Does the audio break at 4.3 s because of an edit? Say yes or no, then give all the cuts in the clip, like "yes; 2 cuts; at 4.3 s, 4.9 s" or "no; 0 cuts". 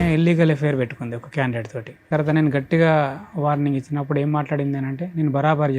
no; 1 cut; at 2.1 s